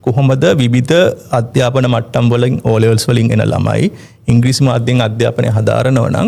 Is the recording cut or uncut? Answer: uncut